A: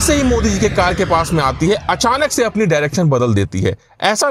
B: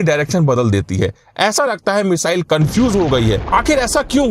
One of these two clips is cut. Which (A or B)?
B